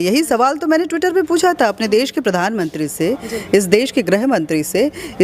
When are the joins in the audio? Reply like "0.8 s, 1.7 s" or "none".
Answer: none